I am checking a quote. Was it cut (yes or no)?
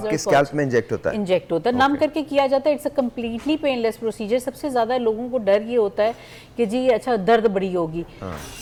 no